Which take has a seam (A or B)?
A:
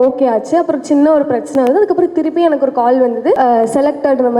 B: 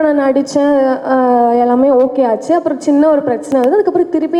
A